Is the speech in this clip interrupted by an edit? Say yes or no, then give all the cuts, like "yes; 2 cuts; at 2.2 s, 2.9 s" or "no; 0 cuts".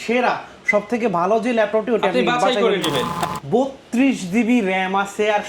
yes; 1 cut; at 3.2 s